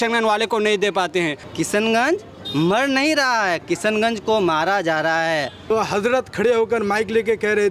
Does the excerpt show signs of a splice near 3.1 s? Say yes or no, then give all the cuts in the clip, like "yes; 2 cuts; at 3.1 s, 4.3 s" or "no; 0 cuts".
no; 2 cuts; at 1.4 s, 5.7 s